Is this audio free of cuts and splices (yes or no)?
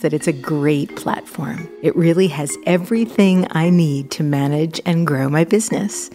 yes